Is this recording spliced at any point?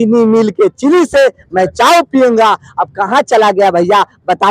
no; 0 cuts

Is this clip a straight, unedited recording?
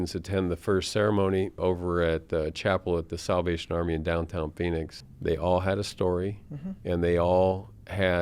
no; 2 cuts; at 1.6 s, 5.0 s

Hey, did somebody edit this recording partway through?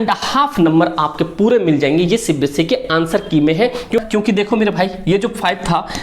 yes; 1 cut; at 4.0 s

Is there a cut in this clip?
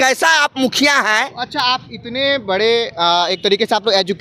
no; 0 cuts

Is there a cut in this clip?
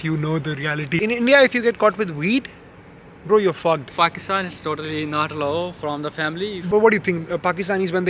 yes; 3 cuts; at 1.0 s, 3.9 s, 6.5 s

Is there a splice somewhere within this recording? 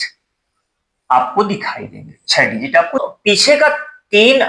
yes; 1 cut; at 3.0 s

